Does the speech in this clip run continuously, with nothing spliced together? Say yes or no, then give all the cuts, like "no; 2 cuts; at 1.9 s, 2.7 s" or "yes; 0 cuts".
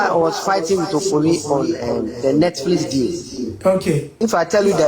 no; 2 cuts; at 3.5 s, 4.1 s